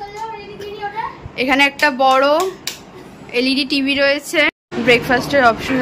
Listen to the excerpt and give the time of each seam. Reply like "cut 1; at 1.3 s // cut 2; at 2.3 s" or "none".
cut 1; at 4.5 s